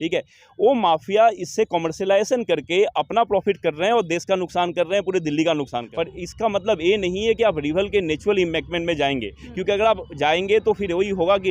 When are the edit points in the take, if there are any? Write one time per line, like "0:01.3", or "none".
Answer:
0:05.8